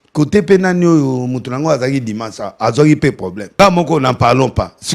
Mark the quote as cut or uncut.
cut